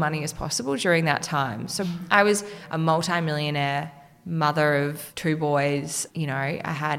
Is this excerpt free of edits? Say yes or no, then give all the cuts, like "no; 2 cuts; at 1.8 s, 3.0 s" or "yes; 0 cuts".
no; 3 cuts; at 1.8 s, 2.6 s, 5.0 s